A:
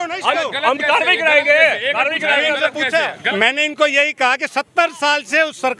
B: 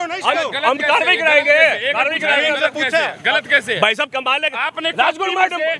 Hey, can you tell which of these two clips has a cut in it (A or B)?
A